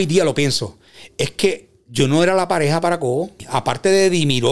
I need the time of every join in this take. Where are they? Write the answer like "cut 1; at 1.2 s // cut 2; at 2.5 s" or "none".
cut 1; at 3.5 s